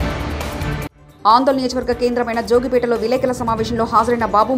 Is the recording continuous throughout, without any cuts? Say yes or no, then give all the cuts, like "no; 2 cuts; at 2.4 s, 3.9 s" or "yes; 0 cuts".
no; 1 cut; at 1.0 s